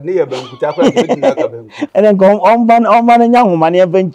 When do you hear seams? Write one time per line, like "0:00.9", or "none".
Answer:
0:01.8

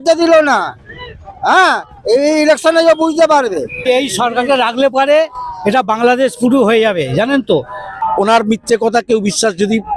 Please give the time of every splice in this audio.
0:03.8
0:08.0

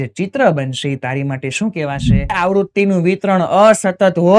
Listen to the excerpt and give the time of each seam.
0:02.4

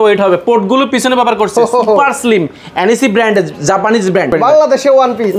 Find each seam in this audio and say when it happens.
0:04.3

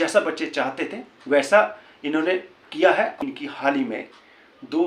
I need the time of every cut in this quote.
0:03.2

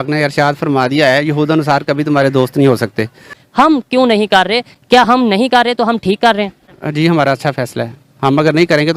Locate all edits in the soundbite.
0:03.4

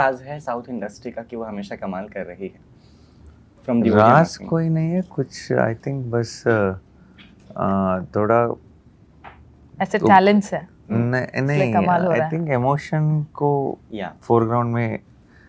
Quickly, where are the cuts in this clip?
none

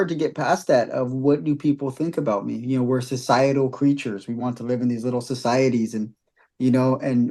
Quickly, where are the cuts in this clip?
none

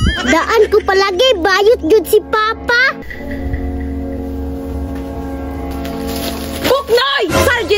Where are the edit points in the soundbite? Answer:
0:03.0

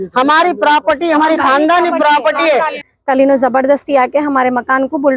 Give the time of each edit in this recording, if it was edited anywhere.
0:02.8

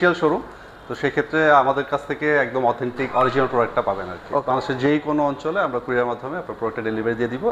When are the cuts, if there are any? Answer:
0:04.4

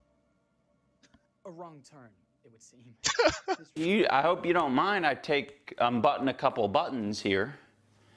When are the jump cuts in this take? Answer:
0:03.6

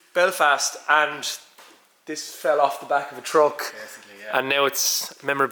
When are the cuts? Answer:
none

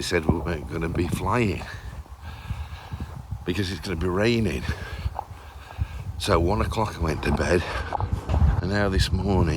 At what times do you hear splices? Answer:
0:08.3

